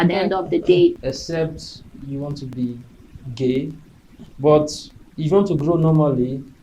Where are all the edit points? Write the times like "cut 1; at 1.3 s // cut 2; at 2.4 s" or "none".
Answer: cut 1; at 1.0 s // cut 2; at 2.5 s // cut 3; at 4.3 s